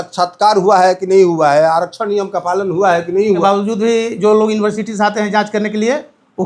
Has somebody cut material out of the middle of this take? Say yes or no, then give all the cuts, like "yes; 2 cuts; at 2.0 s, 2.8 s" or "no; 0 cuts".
yes; 1 cut; at 3.4 s